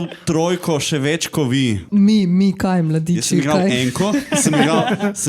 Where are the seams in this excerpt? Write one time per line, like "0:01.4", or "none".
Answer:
0:01.8